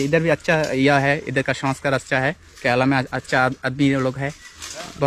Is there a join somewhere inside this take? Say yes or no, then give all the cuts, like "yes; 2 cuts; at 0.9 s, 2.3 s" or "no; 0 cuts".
no; 0 cuts